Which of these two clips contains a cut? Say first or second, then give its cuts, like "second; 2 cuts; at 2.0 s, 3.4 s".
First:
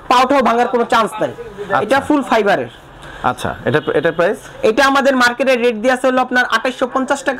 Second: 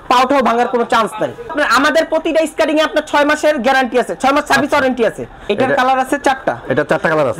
second; 2 cuts; at 1.5 s, 5.4 s